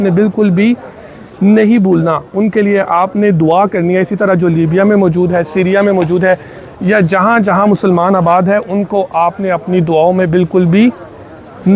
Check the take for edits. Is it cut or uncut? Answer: uncut